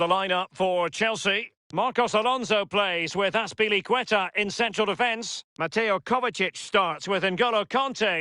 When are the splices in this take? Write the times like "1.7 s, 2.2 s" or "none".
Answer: 1.6 s